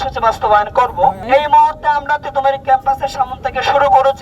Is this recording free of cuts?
no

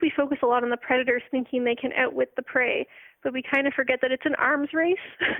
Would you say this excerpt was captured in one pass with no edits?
yes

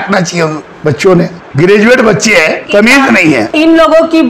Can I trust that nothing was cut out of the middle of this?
no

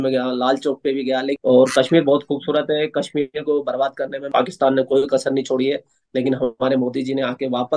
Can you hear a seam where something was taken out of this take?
yes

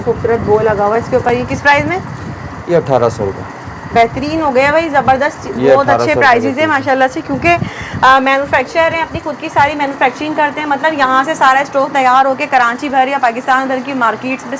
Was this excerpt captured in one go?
yes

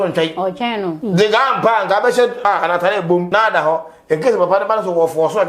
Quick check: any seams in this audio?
yes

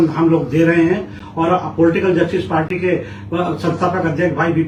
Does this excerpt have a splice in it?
no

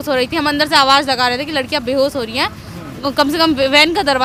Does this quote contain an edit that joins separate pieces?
no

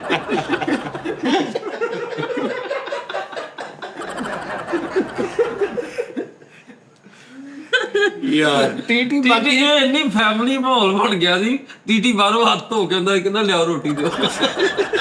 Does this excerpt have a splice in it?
no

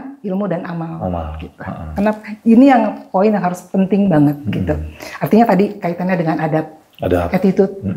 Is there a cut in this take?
no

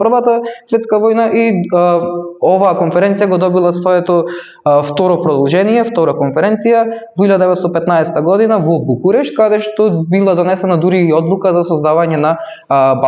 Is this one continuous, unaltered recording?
yes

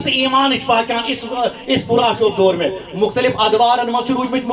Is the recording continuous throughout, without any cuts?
yes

